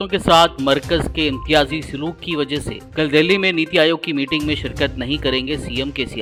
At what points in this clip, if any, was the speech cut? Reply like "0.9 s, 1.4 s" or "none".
none